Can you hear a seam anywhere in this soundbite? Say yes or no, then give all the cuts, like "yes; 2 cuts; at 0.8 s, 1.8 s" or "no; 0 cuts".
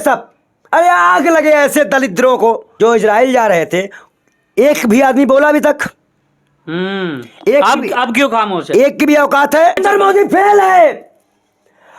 yes; 2 cuts; at 2.7 s, 9.8 s